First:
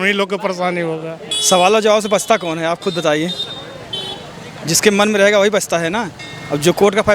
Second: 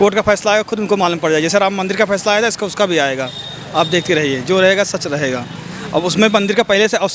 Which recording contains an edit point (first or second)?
first